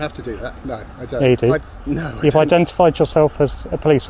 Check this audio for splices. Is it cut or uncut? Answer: uncut